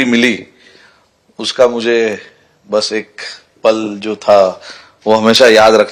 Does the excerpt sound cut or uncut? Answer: uncut